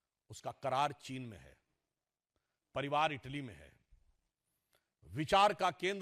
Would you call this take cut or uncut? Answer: uncut